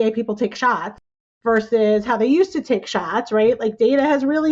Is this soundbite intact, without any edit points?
yes; 0 cuts

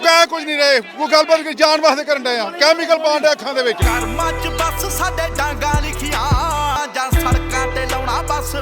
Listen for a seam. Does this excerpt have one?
no; 0 cuts

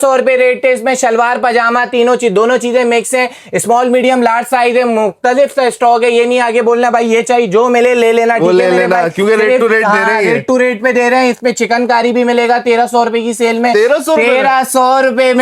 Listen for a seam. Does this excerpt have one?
no; 0 cuts

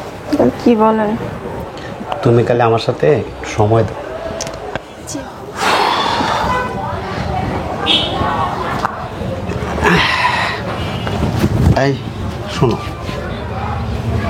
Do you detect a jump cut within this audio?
yes; 1 cut; at 4.3 s

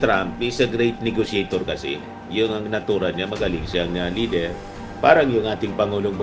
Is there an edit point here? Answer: no; 0 cuts

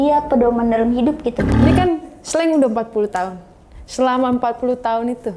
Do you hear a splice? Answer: yes; 1 cut; at 1.5 s

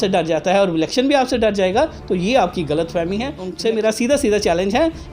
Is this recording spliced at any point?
yes; 1 cut; at 3.4 s

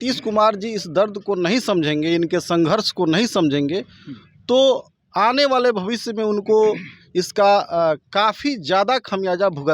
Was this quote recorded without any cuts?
yes; 0 cuts

